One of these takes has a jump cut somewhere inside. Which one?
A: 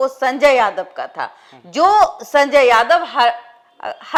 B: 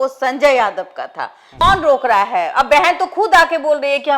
B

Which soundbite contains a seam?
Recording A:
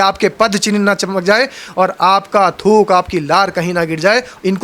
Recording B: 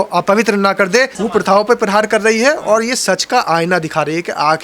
B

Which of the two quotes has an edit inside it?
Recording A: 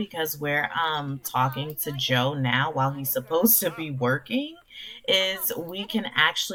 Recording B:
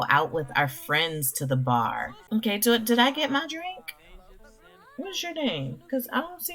B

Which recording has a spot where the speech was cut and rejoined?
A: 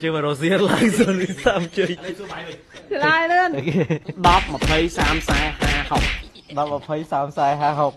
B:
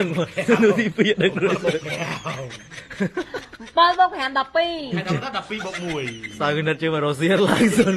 A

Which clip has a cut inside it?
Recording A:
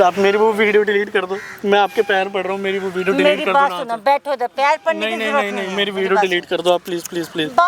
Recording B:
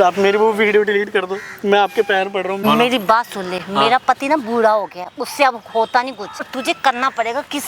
B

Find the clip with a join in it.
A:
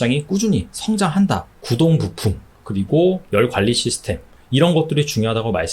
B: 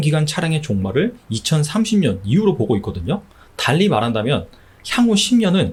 A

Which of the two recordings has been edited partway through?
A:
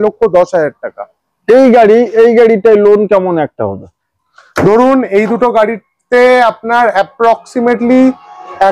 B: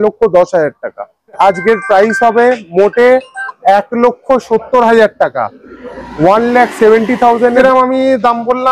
B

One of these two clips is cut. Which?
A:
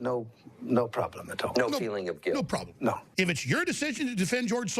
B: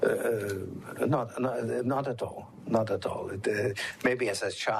A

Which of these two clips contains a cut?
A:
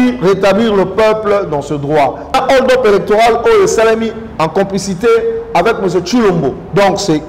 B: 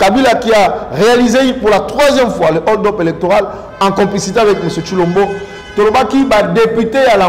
A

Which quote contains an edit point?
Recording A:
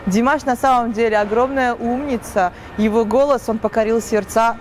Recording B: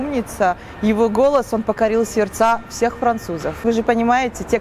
B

